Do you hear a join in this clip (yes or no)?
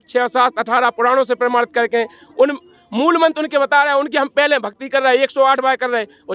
no